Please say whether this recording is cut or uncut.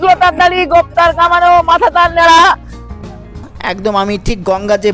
cut